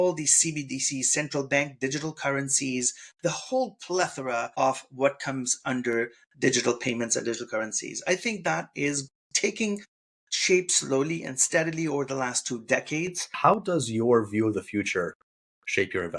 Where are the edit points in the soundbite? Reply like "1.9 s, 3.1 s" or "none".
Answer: 13.3 s